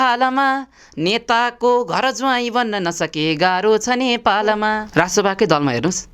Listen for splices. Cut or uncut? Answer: cut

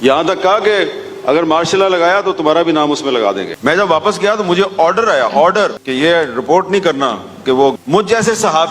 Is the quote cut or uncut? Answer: cut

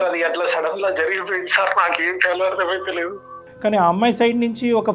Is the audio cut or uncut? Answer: uncut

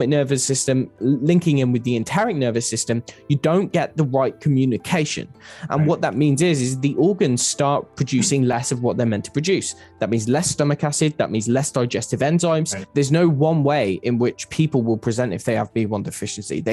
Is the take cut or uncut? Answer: uncut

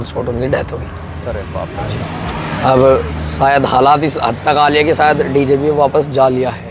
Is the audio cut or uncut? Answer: uncut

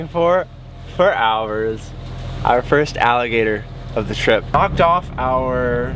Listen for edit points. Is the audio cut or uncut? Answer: cut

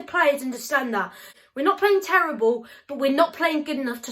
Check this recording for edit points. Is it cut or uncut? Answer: cut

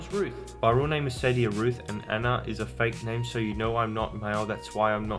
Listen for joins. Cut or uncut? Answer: uncut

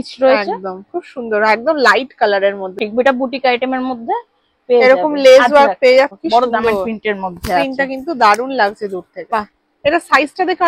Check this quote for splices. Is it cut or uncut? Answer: cut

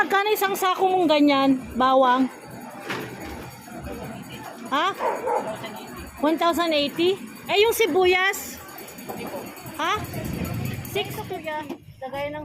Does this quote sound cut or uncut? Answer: cut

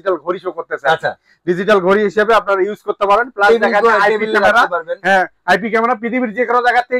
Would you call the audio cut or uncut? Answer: uncut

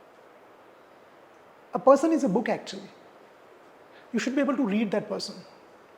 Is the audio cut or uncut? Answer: uncut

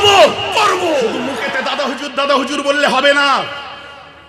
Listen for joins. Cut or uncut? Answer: cut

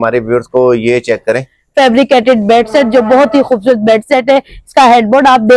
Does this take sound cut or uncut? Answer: cut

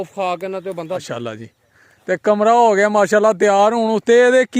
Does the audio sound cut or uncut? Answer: cut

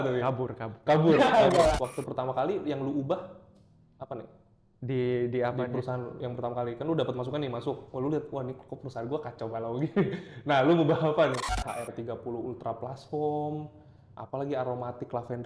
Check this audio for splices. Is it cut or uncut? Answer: cut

